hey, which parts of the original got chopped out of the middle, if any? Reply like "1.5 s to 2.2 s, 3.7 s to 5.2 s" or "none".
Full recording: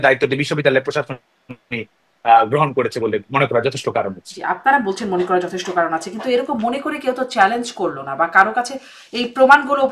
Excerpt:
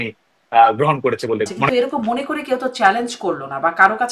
3.4 s to 6.2 s